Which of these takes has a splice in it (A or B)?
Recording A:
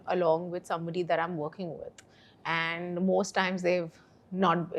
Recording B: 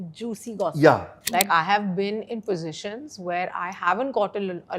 B